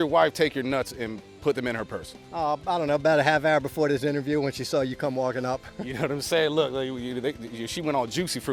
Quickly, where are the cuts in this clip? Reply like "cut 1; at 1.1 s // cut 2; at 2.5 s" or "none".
none